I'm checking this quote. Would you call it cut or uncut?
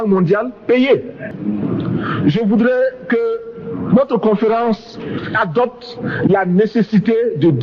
cut